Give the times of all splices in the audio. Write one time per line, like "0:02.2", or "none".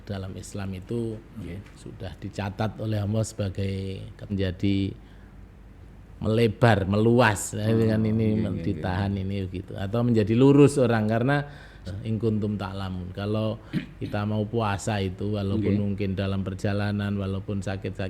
0:04.3
0:11.8